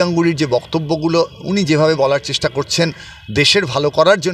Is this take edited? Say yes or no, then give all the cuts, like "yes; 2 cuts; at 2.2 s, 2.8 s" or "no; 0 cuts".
no; 0 cuts